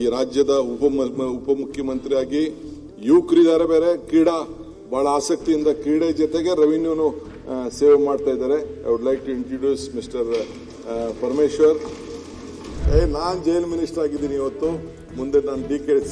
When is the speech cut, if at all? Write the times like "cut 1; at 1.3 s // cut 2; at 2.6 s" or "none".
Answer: cut 1; at 12.9 s